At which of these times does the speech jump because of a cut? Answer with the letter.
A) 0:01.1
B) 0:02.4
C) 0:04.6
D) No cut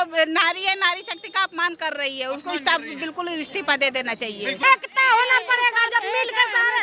C